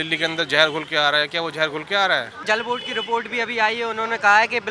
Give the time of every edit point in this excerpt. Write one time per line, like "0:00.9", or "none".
0:02.4

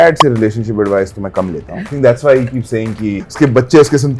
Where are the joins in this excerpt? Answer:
0:01.8
0:03.2

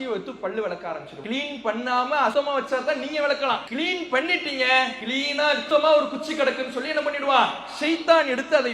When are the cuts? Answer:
0:01.1
0:02.3
0:03.7
0:05.3

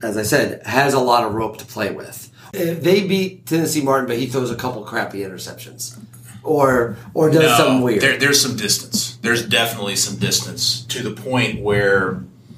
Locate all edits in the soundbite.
0:02.5

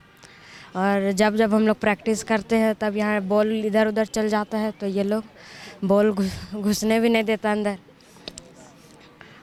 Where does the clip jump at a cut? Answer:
none

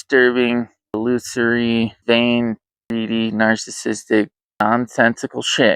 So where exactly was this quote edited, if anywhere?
0:00.9
0:02.0
0:02.7
0:04.6

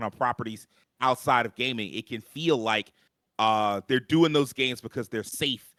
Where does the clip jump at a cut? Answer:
none

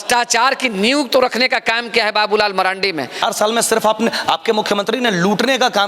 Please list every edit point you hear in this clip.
0:03.2

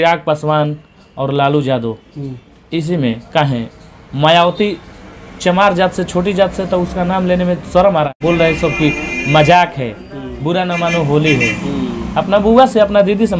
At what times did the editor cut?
0:08.2

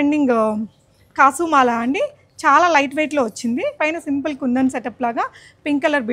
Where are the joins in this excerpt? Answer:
0:03.8

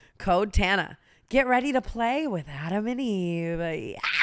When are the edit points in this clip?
none

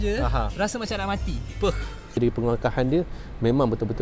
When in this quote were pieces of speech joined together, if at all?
0:02.2

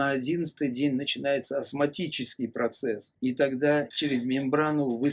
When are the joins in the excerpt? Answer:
0:03.1
0:03.9

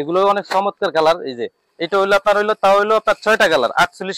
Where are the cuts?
none

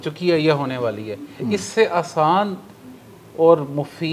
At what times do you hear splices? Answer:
none

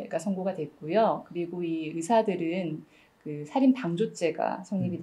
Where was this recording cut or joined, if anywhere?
none

